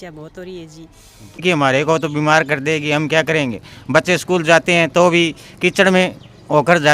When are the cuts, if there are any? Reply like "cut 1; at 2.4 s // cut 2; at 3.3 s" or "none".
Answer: cut 1; at 1.4 s